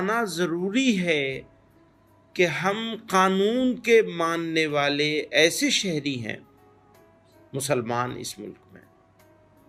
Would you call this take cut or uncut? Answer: uncut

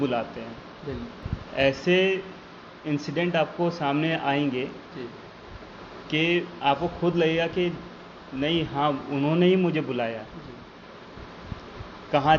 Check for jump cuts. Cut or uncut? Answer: uncut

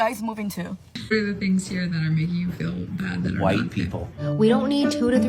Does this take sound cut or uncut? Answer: cut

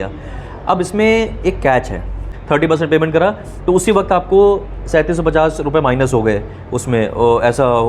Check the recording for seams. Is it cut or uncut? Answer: cut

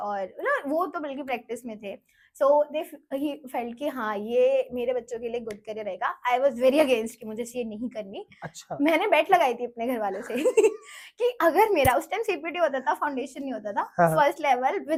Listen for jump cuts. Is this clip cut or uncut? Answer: uncut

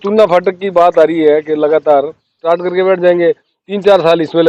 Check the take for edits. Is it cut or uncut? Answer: cut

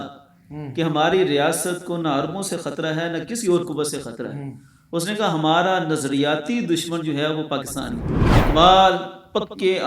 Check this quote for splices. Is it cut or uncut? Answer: cut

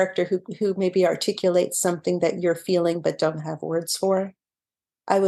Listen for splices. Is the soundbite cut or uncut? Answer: uncut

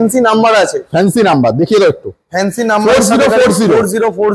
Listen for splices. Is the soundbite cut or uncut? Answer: uncut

